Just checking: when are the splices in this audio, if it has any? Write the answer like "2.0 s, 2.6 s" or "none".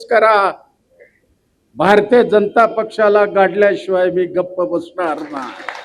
none